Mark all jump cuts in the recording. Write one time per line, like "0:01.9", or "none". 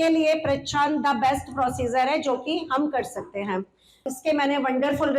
0:04.1